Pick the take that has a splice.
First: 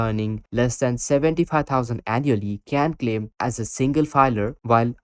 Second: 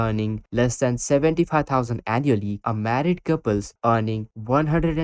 second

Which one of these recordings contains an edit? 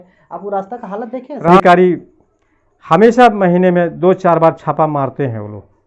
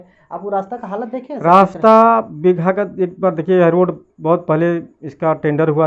first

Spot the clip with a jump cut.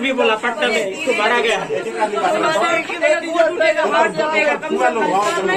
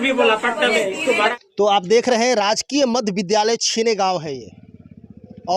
second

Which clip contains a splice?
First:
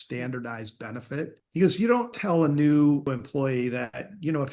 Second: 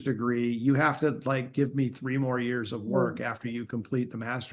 first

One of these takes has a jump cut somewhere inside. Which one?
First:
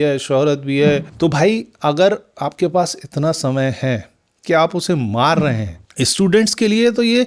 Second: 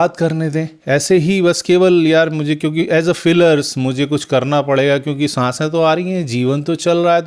first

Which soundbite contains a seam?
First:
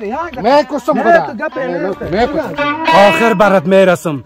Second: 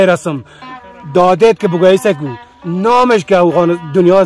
first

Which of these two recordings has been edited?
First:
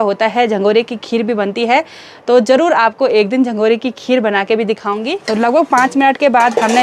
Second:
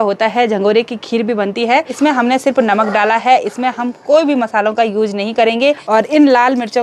second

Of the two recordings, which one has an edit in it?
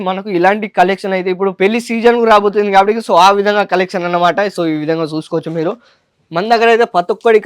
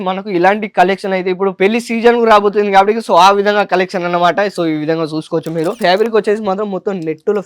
second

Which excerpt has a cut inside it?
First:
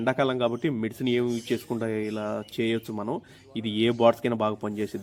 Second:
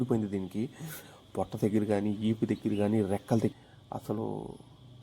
second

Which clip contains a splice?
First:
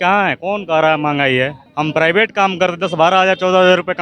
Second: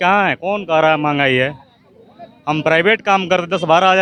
first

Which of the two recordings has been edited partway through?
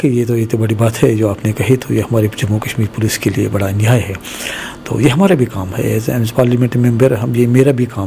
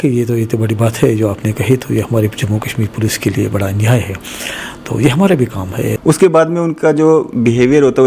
second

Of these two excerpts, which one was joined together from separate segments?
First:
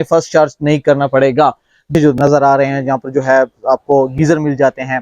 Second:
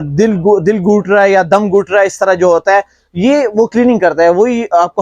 first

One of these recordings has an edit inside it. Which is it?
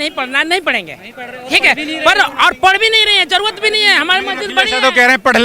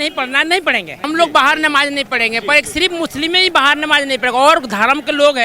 second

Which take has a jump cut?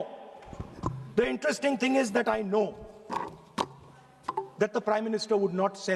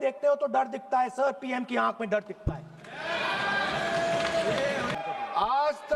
second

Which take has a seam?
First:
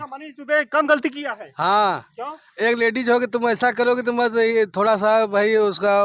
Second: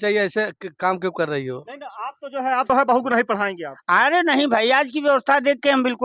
second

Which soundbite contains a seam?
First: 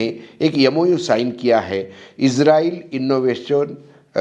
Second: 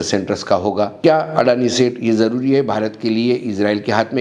second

